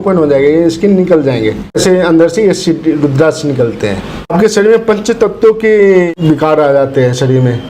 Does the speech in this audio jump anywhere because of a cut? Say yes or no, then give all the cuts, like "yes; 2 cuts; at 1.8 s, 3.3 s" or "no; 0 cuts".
yes; 3 cuts; at 1.8 s, 4.3 s, 6.1 s